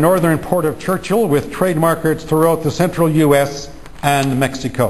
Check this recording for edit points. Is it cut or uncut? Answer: uncut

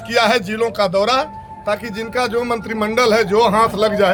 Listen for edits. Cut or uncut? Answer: uncut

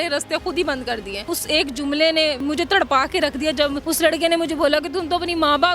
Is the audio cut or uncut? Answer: cut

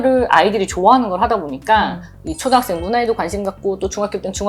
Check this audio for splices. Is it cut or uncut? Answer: uncut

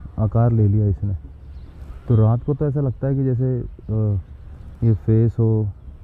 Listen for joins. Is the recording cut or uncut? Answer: uncut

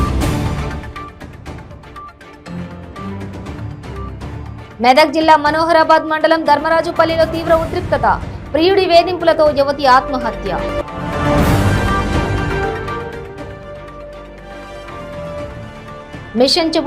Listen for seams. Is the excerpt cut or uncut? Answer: cut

